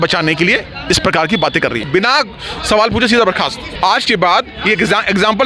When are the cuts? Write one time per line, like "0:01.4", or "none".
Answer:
0:01.8
0:03.6